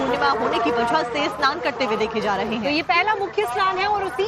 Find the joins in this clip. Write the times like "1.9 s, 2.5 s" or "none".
2.3 s